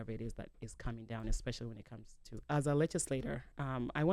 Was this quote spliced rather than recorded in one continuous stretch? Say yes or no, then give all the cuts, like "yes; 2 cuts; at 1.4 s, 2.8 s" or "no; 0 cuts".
yes; 1 cut; at 2.4 s